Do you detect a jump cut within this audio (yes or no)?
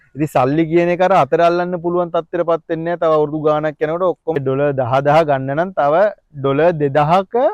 yes